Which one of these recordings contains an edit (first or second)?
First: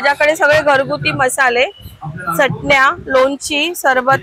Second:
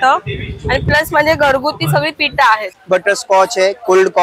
second